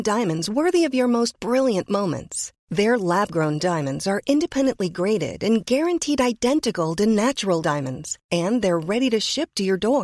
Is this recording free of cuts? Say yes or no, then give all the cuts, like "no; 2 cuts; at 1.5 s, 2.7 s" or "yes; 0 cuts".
yes; 0 cuts